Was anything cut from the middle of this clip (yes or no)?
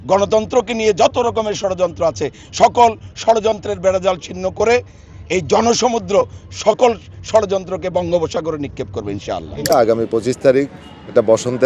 yes